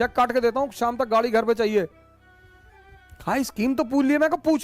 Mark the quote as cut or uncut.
uncut